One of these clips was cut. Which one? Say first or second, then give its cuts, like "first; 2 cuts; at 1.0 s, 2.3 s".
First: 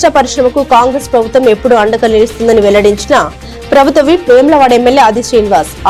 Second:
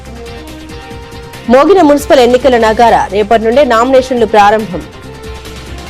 second; 2 cuts; at 0.9 s, 4.9 s